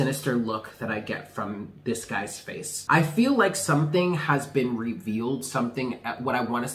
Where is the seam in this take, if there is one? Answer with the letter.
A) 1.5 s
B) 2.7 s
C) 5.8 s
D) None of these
B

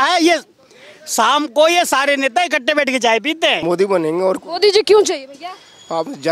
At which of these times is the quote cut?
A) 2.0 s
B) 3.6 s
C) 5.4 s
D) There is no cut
B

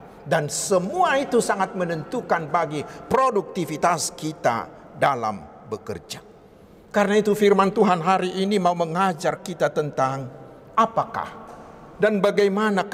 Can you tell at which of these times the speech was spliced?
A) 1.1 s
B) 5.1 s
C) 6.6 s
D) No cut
D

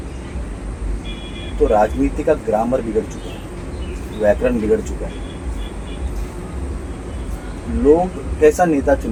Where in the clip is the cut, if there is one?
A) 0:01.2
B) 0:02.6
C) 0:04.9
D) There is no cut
D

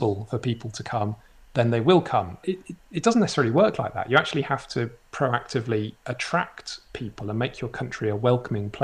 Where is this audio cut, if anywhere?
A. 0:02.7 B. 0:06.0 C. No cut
C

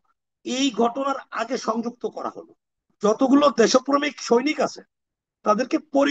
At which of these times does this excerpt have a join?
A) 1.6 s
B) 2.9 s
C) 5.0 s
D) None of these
B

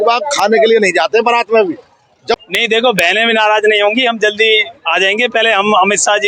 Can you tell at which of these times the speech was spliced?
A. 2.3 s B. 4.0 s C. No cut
A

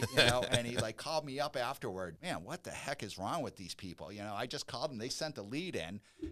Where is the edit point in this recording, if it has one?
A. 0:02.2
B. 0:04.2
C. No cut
A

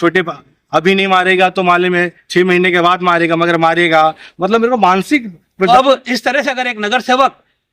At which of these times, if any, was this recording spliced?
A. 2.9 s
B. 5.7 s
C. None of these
B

